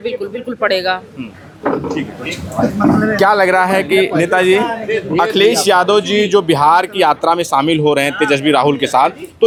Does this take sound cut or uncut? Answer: uncut